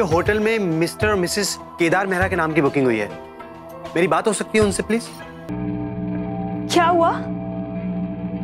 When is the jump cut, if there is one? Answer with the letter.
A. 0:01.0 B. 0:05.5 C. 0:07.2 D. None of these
B